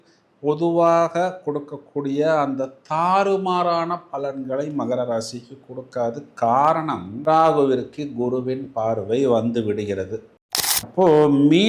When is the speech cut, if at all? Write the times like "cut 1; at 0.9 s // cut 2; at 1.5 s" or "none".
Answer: cut 1; at 10.3 s